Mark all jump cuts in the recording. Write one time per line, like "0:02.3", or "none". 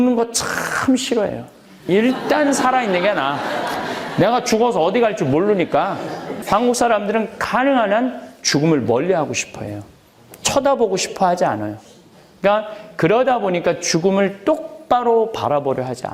0:06.3